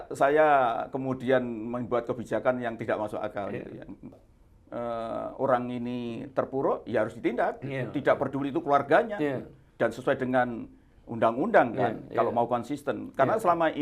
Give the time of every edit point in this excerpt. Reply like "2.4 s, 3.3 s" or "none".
4.2 s